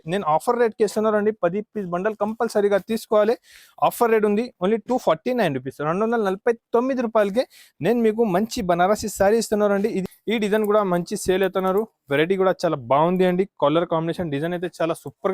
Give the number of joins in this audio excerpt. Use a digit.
1